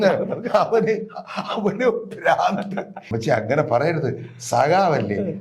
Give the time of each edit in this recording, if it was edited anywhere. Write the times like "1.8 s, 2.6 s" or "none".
3.0 s

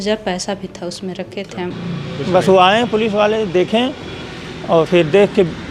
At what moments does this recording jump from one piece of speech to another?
1.8 s

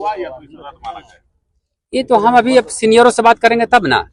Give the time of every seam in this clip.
none

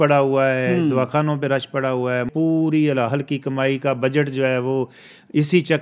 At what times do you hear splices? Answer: 2.3 s

